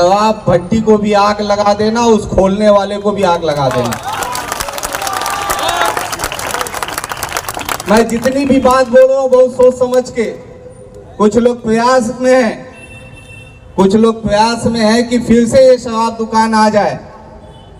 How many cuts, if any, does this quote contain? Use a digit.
0